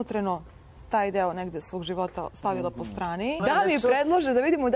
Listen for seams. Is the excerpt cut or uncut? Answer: cut